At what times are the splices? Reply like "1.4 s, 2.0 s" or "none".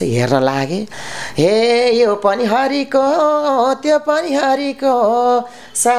1.0 s